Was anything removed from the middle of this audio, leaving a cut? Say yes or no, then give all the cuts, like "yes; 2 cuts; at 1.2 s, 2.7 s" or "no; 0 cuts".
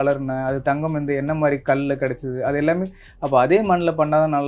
no; 0 cuts